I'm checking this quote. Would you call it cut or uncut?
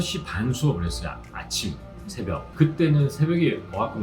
cut